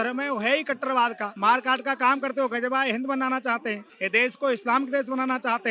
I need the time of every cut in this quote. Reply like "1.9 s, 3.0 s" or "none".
1.3 s, 3.9 s